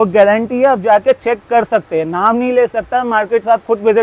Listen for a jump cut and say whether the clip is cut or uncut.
uncut